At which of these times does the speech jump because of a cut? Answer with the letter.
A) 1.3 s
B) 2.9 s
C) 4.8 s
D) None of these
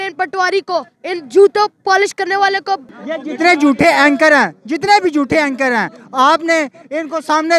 B